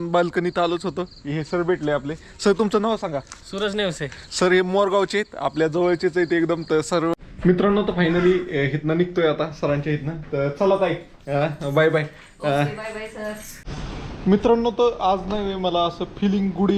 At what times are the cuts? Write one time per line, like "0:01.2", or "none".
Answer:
0:07.1
0:13.6